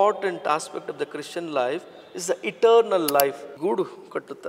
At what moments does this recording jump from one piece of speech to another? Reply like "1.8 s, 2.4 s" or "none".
3.5 s